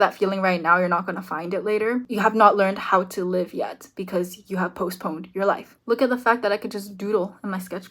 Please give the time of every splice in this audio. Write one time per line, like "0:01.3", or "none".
0:02.1
0:05.7